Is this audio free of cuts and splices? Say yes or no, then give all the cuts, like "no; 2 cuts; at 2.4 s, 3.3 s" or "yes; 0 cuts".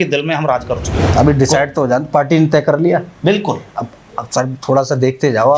no; 1 cut; at 1.0 s